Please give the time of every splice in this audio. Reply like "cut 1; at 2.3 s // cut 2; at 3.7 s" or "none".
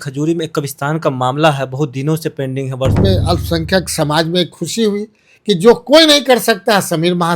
cut 1; at 3.0 s